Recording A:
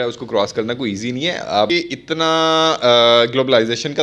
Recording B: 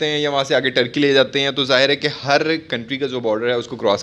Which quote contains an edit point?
A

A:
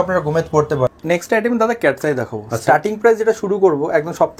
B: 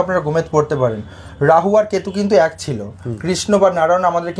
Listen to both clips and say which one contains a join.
A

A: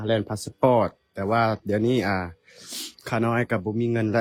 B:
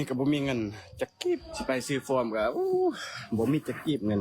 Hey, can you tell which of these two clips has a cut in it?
B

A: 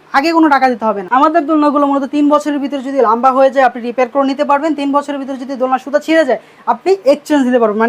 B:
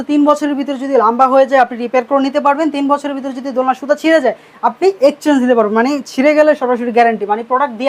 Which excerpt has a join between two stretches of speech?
A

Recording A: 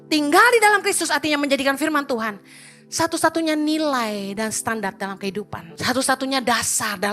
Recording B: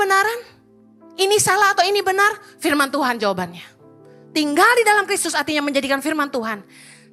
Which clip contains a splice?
A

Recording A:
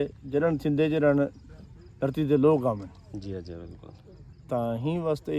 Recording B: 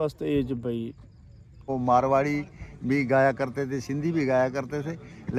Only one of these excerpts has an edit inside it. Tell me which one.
B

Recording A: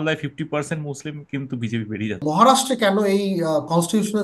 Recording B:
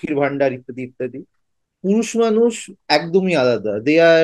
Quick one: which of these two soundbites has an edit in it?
A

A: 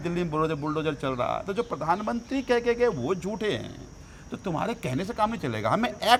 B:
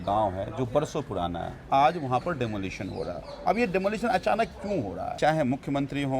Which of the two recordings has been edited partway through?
B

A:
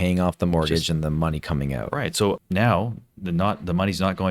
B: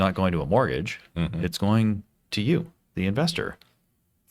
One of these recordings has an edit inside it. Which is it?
A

